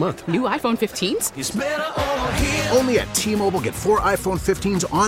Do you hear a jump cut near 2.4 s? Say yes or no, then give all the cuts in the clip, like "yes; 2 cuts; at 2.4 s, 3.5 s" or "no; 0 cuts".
no; 0 cuts